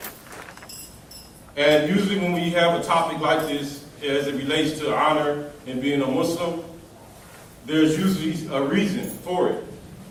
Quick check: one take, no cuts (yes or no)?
yes